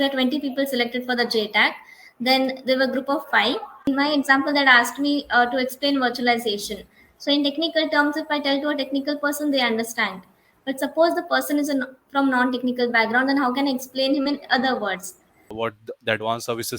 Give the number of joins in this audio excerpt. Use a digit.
2